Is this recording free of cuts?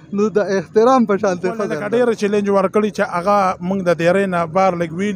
no; 1 cut; at 1.7 s

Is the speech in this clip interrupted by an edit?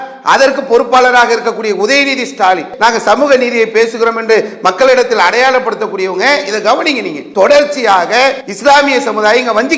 yes; 3 cuts; at 2.7 s, 7.2 s, 8.5 s

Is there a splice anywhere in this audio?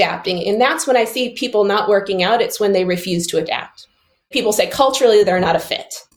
yes; 1 cut; at 4.3 s

